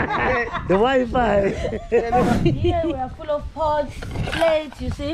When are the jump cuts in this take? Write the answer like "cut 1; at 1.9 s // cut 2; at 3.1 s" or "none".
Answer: cut 1; at 2.3 s